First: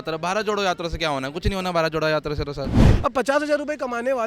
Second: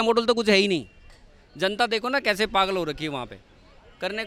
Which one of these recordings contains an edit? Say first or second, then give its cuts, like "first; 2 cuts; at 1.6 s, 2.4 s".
first; 1 cut; at 2.8 s